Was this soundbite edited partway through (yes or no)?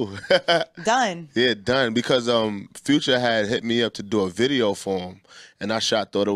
no